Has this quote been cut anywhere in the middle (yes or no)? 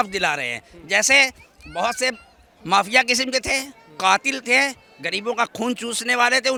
no